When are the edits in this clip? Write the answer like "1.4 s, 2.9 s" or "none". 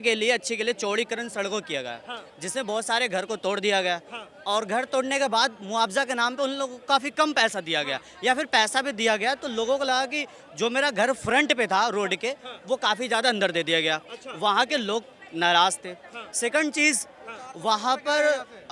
none